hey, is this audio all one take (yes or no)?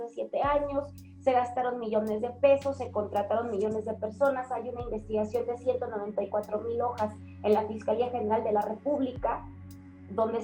yes